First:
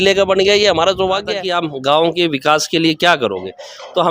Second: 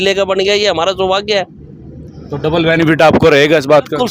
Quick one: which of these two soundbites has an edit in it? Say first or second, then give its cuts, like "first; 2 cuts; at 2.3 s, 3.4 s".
first; 1 cut; at 1.4 s